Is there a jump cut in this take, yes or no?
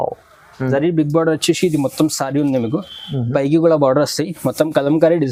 no